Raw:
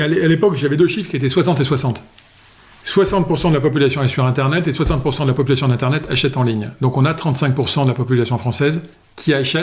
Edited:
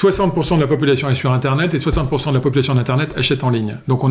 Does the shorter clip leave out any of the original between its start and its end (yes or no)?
no